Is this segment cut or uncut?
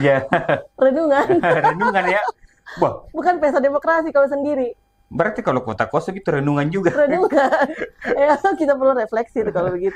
uncut